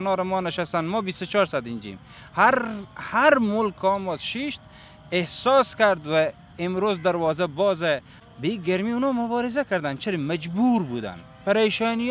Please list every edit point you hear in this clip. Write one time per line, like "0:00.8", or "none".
0:08.1